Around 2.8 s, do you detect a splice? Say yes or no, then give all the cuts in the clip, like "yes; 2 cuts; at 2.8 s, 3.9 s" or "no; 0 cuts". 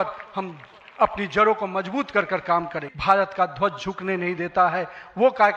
yes; 1 cut; at 2.8 s